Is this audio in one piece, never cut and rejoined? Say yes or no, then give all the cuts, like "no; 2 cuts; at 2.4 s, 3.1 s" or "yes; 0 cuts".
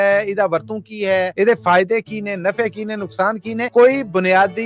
no; 2 cuts; at 1.3 s, 3.7 s